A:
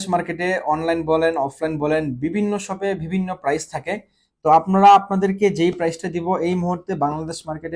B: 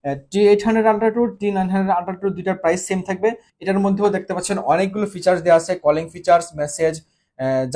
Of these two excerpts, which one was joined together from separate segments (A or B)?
B